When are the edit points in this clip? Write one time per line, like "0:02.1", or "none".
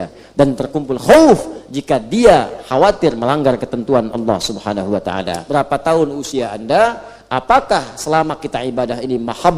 0:05.4